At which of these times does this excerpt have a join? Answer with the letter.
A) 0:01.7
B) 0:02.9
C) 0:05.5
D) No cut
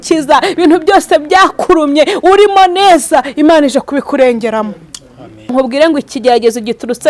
C